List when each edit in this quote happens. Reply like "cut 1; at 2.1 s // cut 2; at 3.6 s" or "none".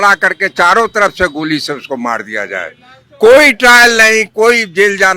none